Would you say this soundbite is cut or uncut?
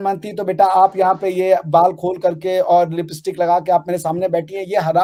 uncut